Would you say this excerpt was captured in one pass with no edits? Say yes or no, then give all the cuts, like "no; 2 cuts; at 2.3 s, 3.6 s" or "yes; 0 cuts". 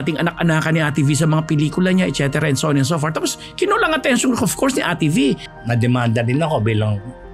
no; 1 cut; at 5.5 s